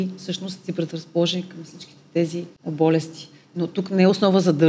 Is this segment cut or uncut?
cut